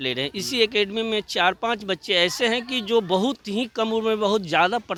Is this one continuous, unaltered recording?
yes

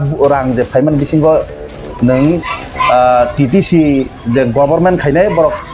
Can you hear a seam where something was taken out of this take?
no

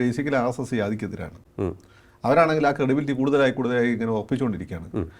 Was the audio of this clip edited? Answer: no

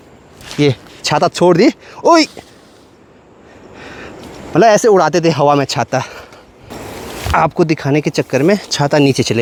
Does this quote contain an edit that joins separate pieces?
no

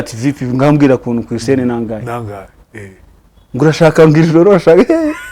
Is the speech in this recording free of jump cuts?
yes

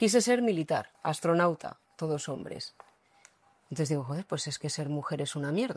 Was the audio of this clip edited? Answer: yes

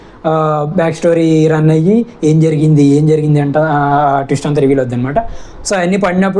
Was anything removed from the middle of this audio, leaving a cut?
no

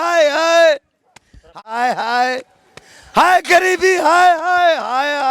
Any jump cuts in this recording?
yes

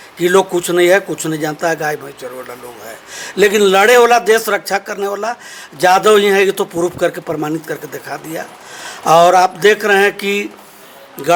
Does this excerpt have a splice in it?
no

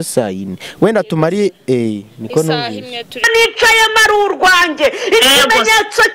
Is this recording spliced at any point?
yes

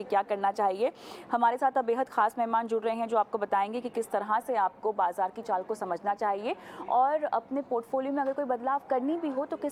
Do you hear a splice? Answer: no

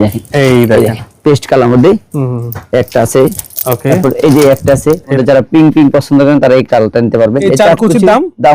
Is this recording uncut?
no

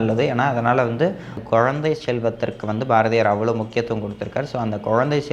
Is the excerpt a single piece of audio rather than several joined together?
no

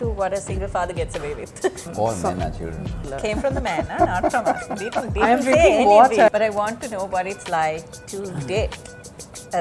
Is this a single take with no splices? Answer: no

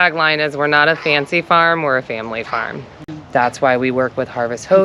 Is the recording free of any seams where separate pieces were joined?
no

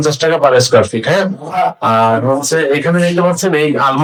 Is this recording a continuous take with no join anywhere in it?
yes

